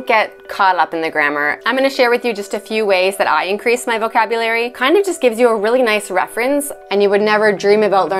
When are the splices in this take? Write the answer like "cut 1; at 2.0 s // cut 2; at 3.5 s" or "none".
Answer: cut 1; at 1.6 s // cut 2; at 4.8 s // cut 3; at 6.7 s